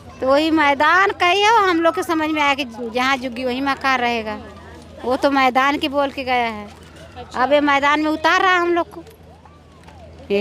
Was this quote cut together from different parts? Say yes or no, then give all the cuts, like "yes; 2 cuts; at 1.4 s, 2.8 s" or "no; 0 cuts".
no; 0 cuts